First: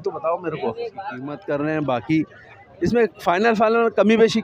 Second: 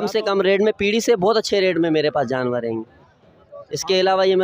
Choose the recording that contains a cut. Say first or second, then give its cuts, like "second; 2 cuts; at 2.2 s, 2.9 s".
first; 1 cut; at 1.3 s